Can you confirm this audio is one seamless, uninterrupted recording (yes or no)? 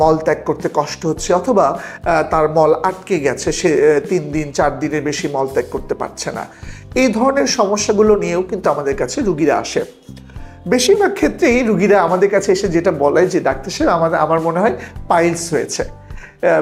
yes